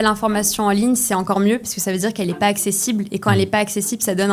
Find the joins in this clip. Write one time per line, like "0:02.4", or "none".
none